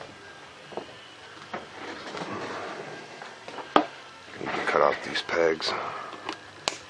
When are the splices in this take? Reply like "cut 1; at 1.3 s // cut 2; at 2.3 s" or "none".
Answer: cut 1; at 4.8 s